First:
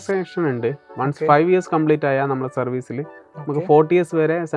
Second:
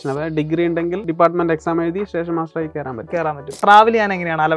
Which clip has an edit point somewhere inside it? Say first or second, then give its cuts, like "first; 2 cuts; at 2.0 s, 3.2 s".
second; 2 cuts; at 1.1 s, 3.6 s